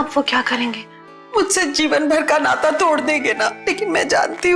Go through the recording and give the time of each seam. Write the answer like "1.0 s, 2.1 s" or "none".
3.6 s